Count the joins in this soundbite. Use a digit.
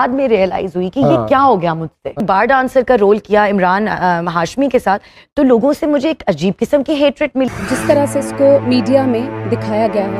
2